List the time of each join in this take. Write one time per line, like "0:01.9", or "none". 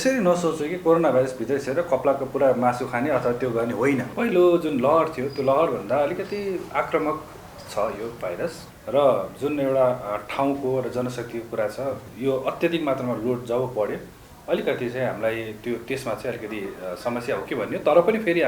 0:04.1
0:08.7